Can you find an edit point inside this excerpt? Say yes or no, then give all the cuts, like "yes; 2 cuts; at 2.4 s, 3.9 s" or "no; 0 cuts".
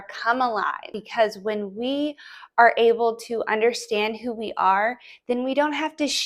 yes; 1 cut; at 1.0 s